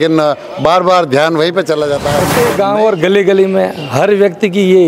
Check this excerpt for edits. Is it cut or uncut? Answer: cut